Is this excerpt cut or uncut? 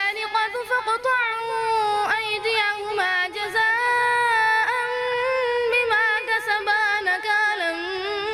uncut